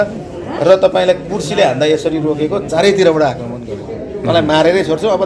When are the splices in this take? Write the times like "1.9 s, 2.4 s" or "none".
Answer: none